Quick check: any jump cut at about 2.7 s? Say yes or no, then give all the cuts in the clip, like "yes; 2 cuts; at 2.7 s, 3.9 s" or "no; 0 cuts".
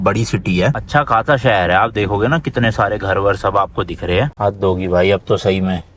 no; 2 cuts; at 0.8 s, 4.3 s